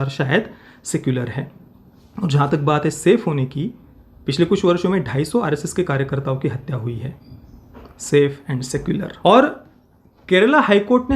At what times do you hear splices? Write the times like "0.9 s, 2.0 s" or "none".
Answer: 9.1 s